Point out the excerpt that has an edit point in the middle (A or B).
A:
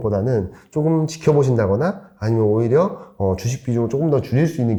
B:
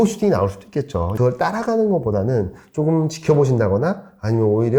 B